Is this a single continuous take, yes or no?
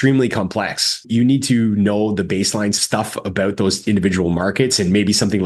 no